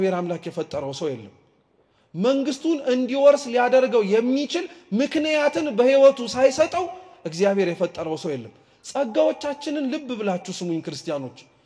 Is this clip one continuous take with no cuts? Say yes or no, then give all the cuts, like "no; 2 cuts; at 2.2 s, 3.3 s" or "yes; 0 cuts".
yes; 0 cuts